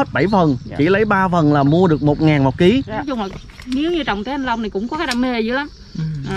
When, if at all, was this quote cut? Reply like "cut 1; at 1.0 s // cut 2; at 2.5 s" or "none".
cut 1; at 3.0 s